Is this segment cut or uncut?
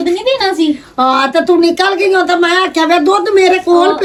uncut